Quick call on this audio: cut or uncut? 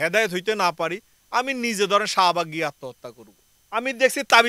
cut